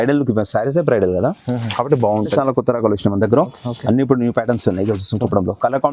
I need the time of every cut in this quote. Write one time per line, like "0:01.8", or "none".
0:02.3